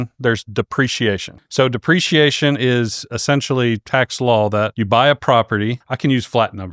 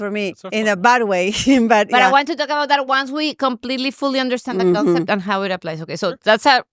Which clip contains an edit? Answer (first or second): first